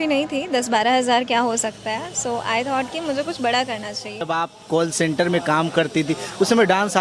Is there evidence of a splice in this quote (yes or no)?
yes